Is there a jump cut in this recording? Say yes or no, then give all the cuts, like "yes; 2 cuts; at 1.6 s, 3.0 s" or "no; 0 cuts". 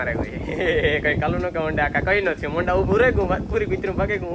no; 0 cuts